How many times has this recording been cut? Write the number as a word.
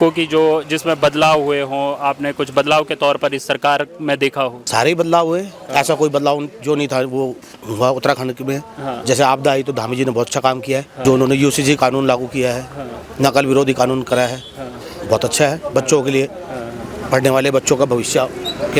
two